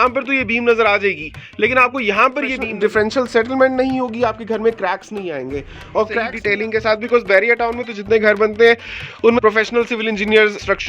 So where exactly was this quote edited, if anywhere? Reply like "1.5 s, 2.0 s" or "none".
2.7 s, 6.3 s, 9.4 s